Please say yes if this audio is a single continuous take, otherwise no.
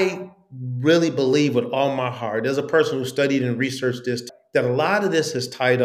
no